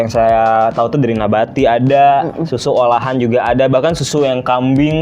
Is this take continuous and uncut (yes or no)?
yes